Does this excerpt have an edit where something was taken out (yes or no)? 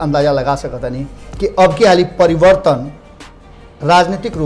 no